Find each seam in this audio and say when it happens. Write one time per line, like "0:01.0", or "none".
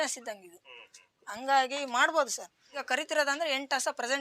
0:02.8